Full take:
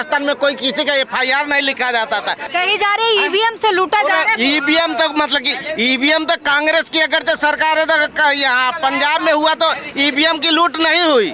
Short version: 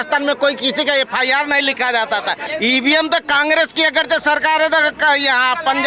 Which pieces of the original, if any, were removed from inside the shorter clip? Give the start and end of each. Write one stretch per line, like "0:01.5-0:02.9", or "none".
0:02.4-0:05.6